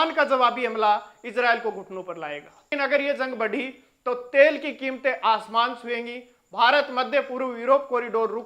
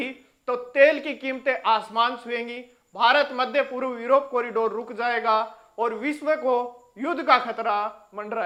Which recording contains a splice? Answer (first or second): first